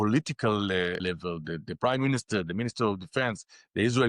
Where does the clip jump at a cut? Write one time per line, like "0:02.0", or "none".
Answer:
0:01.0